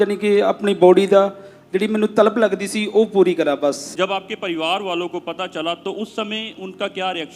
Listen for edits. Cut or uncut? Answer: uncut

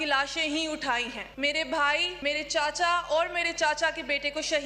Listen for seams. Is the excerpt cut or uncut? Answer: cut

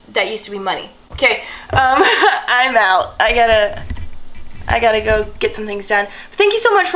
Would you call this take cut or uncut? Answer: uncut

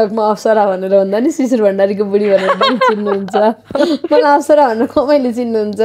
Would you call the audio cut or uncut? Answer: uncut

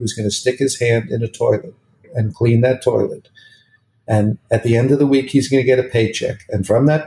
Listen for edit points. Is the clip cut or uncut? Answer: cut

